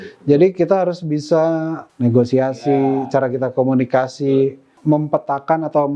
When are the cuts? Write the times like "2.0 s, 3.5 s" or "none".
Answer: 1.8 s, 4.7 s